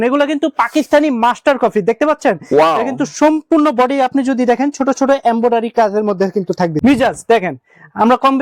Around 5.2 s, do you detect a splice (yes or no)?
no